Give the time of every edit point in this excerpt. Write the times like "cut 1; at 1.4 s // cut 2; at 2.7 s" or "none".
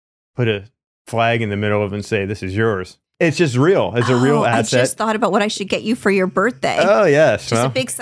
cut 1; at 3.0 s